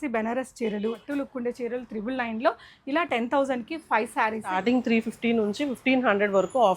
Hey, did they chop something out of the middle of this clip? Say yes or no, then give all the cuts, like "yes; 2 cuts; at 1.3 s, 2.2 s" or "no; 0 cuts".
yes; 2 cuts; at 1.0 s, 4.6 s